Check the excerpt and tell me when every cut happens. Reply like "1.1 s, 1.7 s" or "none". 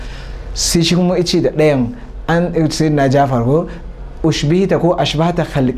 none